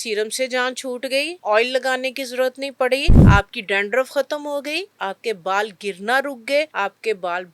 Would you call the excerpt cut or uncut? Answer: cut